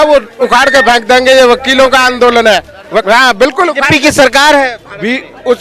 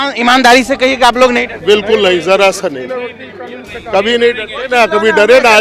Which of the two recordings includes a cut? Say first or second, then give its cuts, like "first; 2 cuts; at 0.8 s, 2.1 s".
first; 1 cut; at 3.0 s